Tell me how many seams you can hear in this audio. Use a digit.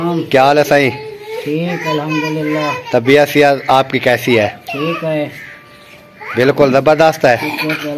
0